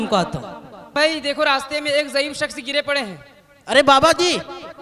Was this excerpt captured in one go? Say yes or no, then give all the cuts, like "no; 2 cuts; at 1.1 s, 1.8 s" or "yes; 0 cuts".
no; 1 cut; at 0.9 s